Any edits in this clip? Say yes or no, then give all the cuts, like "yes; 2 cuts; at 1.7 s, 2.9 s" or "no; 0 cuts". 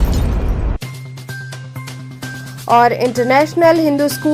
yes; 1 cut; at 1.3 s